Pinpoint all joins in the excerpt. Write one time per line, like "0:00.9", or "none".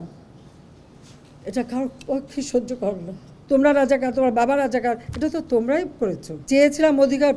0:03.3
0:06.3